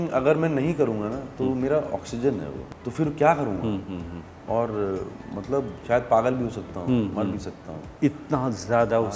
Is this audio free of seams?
no; 3 cuts; at 2.6 s, 4.4 s, 5.8 s

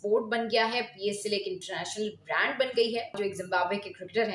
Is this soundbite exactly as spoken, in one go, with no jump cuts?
no; 1 cut; at 3.1 s

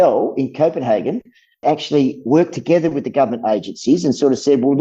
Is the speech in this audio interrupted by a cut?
no; 0 cuts

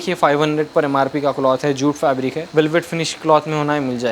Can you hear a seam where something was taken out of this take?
yes; 1 cut; at 2.4 s

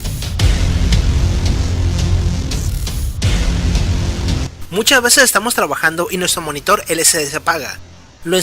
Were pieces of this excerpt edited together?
yes; 1 cut; at 3.6 s

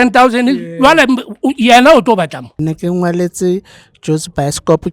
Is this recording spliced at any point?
yes; 1 cut; at 2.6 s

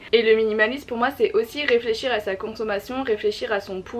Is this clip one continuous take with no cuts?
yes; 0 cuts

